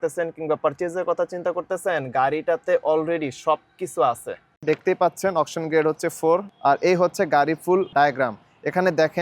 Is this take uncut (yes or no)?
no